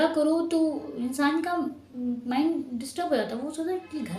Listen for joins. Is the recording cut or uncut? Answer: uncut